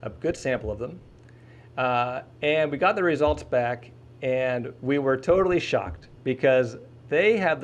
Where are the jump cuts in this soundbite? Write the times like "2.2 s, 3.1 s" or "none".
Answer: none